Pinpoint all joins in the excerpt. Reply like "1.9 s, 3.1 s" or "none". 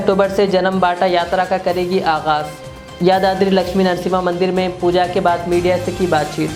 none